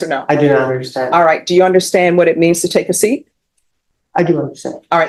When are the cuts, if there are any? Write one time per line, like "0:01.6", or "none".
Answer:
none